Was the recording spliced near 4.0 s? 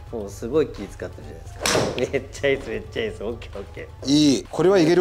yes; 1 cut; at 4.0 s

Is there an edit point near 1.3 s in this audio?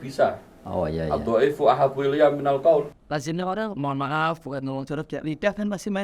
no; 1 cut; at 3.0 s

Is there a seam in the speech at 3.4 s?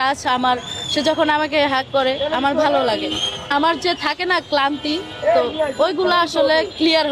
yes; 1 cut; at 3.4 s

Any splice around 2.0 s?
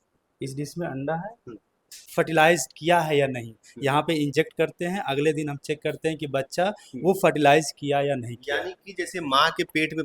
yes; 1 cut; at 2.0 s

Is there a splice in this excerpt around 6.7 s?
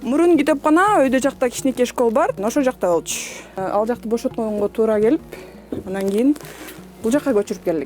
no; 2 cuts; at 2.4 s, 3.6 s

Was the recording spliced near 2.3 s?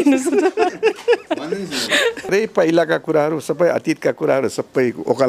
yes; 1 cut; at 2.3 s

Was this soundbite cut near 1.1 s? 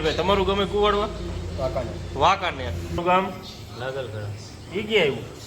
no; 1 cut; at 3.0 s

